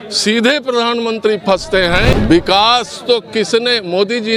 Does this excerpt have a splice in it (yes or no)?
yes